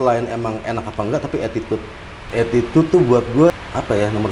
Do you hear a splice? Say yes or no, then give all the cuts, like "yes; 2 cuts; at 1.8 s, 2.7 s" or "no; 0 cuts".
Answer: yes; 2 cuts; at 2.1 s, 3.5 s